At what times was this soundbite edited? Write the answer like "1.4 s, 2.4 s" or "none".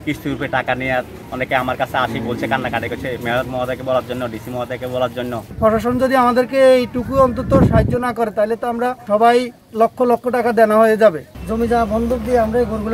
1.2 s, 5.5 s, 9.0 s, 9.7 s, 11.3 s